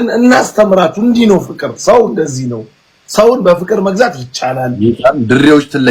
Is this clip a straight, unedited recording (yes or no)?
yes